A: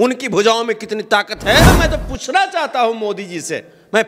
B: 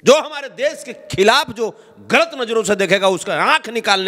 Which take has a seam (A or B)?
A